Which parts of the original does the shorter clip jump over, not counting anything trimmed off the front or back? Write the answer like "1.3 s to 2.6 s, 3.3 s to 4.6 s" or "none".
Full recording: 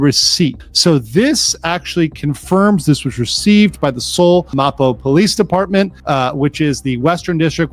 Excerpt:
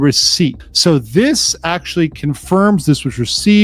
none